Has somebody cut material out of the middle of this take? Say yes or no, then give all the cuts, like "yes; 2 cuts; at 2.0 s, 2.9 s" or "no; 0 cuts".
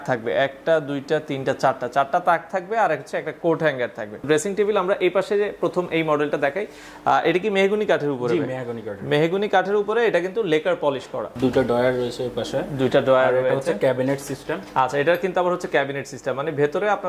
yes; 2 cuts; at 4.2 s, 11.3 s